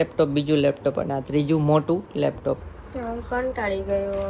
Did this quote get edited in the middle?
yes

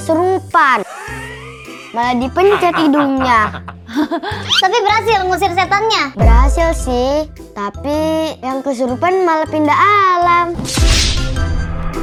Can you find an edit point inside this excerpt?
no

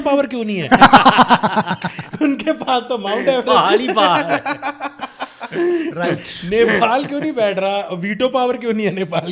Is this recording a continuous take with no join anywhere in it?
yes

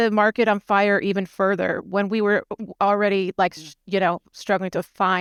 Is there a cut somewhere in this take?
no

